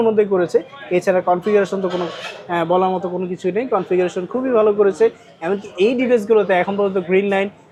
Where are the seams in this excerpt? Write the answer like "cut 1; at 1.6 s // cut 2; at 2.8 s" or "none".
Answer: none

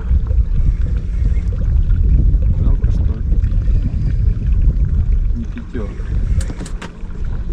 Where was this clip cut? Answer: none

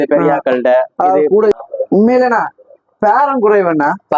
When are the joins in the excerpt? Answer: cut 1; at 1.6 s

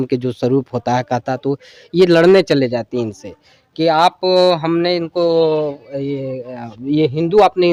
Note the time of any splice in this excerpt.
none

